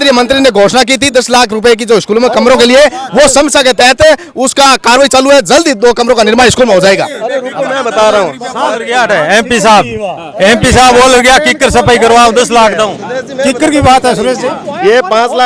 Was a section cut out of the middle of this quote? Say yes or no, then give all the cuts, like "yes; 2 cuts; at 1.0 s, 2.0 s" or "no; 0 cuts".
no; 0 cuts